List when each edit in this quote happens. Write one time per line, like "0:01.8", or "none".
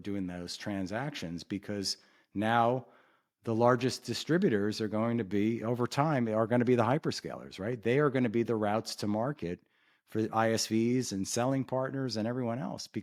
none